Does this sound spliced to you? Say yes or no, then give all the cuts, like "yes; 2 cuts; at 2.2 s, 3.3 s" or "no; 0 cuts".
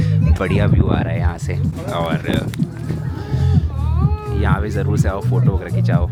no; 0 cuts